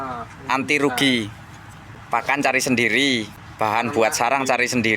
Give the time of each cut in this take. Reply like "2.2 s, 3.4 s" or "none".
1.9 s, 3.4 s